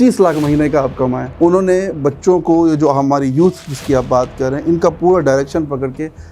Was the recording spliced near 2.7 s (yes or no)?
no